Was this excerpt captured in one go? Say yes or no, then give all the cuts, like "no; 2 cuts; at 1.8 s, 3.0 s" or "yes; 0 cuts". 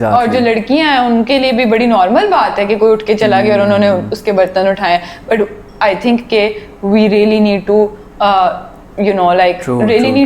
yes; 0 cuts